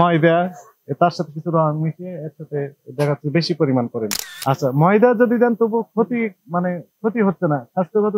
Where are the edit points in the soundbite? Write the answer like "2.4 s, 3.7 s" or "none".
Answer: 4.3 s